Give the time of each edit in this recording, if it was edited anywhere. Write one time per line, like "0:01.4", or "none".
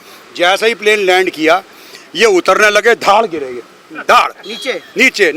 none